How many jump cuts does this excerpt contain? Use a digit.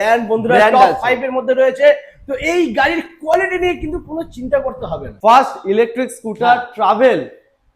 1